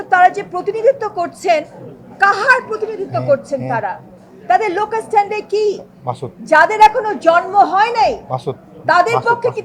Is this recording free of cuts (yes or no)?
yes